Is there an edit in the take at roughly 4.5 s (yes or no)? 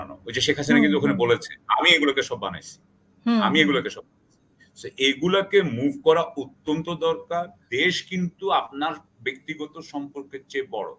no